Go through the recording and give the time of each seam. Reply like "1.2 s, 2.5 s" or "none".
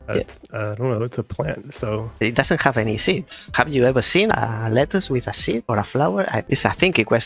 2.1 s, 3.4 s, 4.3 s, 5.6 s, 6.5 s